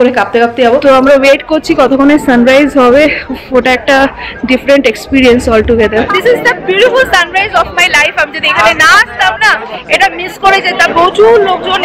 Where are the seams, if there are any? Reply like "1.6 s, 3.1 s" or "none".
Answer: 0.8 s, 6.1 s, 10.9 s